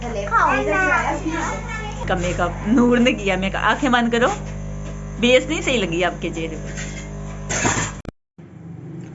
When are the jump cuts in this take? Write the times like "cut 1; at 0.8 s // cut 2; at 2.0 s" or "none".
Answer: cut 1; at 2.0 s // cut 2; at 8.0 s

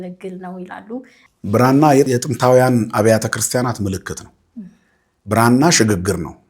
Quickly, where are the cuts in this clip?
cut 1; at 1.2 s

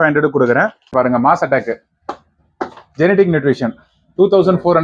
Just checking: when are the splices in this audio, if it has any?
cut 1; at 0.9 s

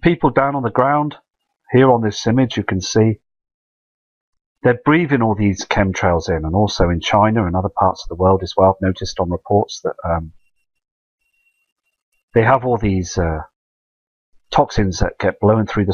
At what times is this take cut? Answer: cut 1; at 8.2 s

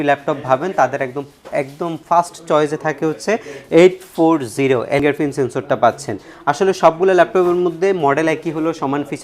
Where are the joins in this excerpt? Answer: cut 1; at 5.0 s

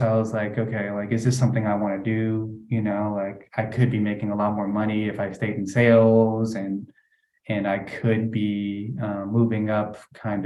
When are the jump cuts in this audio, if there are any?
none

